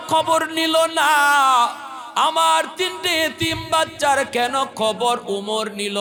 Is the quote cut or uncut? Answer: uncut